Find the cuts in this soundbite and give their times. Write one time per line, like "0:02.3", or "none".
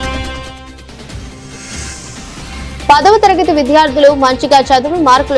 0:02.3